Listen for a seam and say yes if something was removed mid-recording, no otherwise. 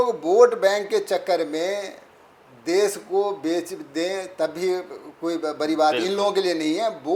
no